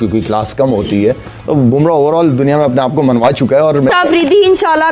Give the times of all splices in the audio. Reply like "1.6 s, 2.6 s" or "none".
3.9 s